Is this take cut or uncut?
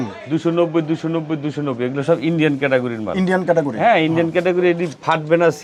uncut